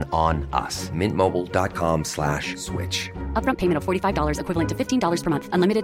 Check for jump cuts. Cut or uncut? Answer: uncut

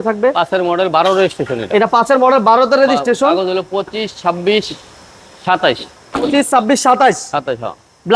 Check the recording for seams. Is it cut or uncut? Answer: uncut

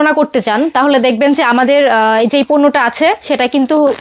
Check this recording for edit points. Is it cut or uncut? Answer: uncut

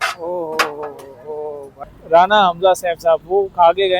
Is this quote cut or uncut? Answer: cut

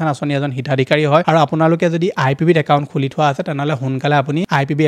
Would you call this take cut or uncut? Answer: uncut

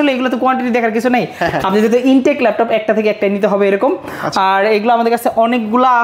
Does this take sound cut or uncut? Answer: uncut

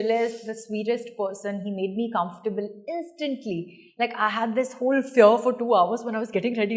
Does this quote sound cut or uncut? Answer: uncut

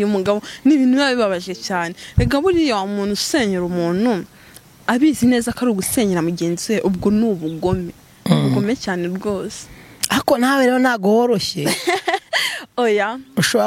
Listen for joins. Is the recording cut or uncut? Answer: uncut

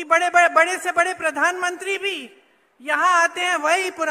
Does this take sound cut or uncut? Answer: uncut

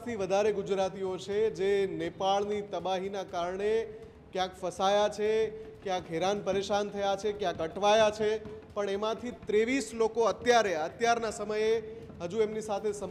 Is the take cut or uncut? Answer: uncut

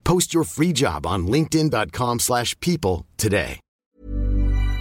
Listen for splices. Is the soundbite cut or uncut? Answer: cut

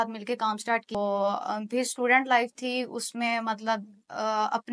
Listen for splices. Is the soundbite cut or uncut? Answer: cut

